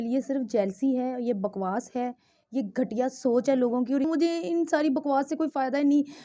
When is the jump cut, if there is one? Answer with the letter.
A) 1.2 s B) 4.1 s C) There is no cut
B